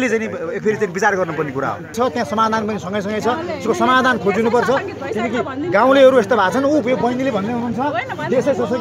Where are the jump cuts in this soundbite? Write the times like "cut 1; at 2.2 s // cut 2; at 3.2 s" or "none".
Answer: cut 1; at 1.9 s